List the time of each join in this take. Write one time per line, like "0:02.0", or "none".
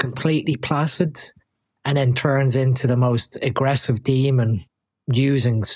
none